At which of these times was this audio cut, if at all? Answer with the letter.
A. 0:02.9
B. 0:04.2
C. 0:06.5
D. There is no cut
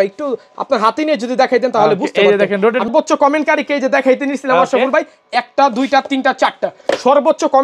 A